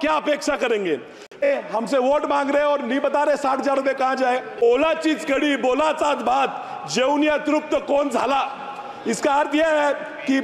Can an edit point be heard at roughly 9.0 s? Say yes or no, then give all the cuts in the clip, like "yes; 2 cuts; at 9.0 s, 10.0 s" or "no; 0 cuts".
no; 2 cuts; at 1.4 s, 4.7 s